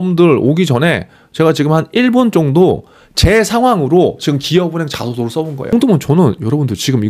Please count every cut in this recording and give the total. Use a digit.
1